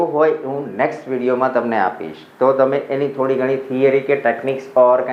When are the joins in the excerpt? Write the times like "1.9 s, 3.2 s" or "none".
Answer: none